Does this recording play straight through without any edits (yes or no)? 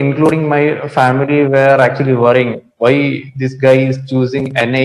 yes